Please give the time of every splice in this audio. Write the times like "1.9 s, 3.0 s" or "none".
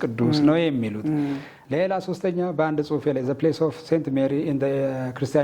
1.5 s